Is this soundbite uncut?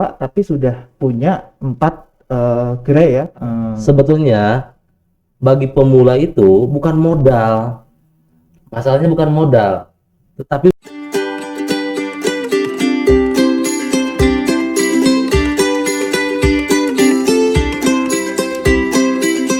no; 2 cuts; at 3.3 s, 10.7 s

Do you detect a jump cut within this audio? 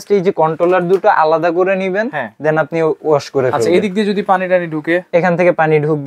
no; 0 cuts

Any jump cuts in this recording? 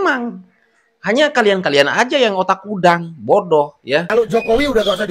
yes; 1 cut; at 4.1 s

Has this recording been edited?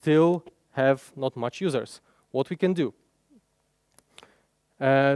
no; 0 cuts

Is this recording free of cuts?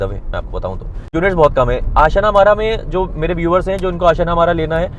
no; 1 cut; at 1.1 s

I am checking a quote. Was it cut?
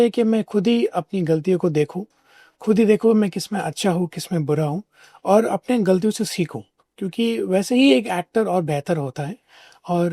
no; 0 cuts

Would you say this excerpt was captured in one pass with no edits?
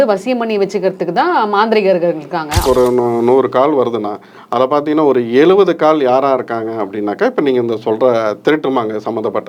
no; 1 cut; at 2.6 s

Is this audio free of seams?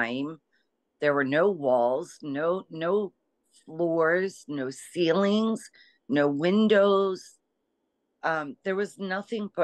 yes; 0 cuts

